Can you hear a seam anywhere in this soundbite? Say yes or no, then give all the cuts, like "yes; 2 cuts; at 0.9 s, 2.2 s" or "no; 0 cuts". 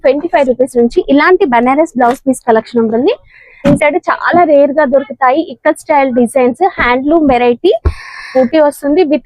yes; 2 cuts; at 3.7 s, 8.3 s